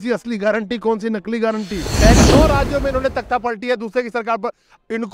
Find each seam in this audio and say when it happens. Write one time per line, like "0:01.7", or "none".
0:02.2

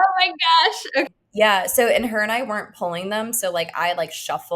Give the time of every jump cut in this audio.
0:01.1

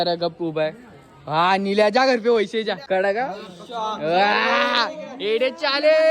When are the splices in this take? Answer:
0:02.8

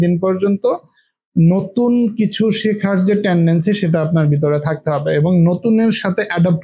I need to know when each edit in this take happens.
none

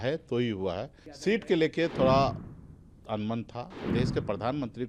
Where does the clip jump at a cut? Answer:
0:01.0
0:03.8

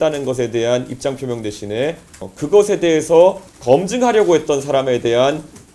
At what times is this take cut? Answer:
0:02.3
0:03.5

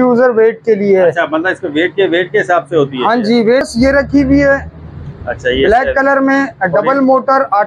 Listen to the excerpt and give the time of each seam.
0:03.7

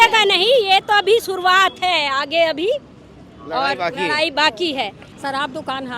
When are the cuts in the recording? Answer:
0:05.0

